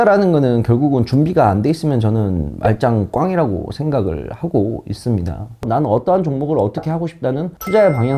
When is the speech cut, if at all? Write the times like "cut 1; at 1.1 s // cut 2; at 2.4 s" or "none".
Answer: cut 1; at 5.6 s